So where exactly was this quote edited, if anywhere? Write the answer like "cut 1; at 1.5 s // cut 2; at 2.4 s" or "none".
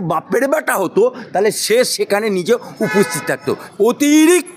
cut 1; at 3.6 s